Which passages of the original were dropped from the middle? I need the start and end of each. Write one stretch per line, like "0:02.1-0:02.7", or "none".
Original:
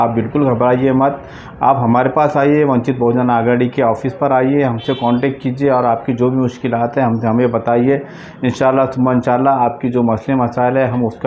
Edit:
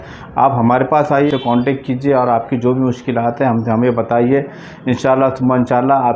0:02.5-0:04.8